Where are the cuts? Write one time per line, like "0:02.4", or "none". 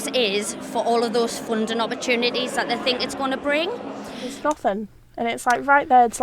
0:04.3